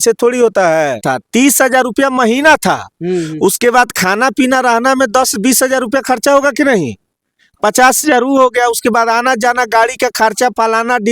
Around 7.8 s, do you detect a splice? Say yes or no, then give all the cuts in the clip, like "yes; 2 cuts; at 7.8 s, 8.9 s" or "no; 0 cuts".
no; 1 cut; at 1.0 s